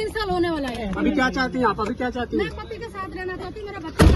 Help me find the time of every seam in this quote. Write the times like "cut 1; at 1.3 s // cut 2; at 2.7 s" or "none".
none

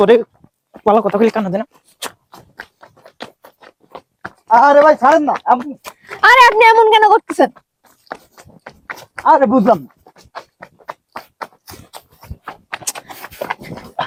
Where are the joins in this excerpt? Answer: none

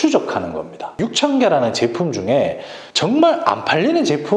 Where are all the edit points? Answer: cut 1; at 0.9 s

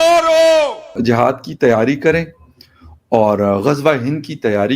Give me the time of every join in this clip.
cut 1; at 0.9 s

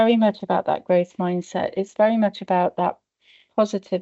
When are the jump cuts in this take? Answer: none

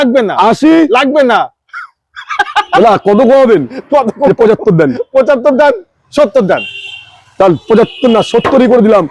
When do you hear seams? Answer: none

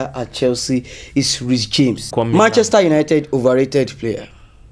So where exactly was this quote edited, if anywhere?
cut 1; at 2.1 s

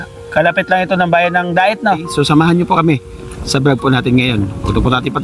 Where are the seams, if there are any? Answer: cut 1; at 2.1 s

